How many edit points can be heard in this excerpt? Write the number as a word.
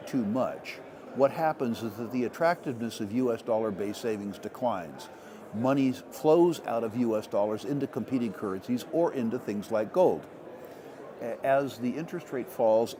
zero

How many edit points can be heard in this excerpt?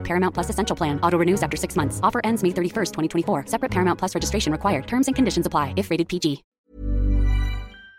one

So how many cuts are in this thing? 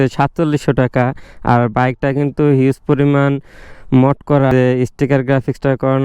one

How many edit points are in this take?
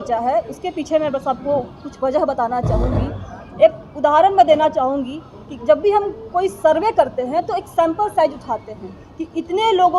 zero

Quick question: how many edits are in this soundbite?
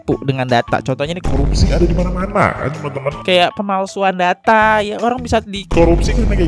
zero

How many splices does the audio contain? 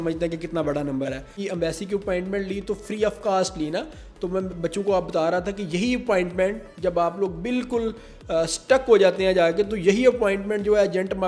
one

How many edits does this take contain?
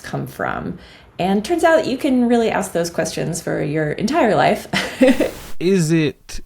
one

